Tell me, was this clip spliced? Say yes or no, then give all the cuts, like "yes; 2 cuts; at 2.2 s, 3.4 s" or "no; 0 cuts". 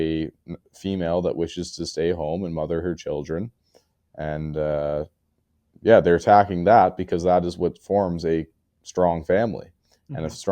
no; 0 cuts